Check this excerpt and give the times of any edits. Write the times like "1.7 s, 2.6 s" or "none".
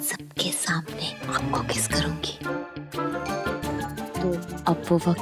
3.6 s